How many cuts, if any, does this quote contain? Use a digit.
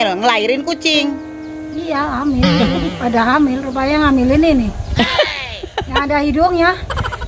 0